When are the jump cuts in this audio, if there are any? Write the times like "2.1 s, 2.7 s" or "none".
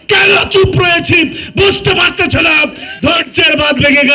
2.8 s